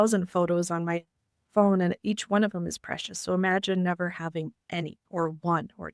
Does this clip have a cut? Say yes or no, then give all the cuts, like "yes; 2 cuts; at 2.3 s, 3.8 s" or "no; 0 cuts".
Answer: no; 0 cuts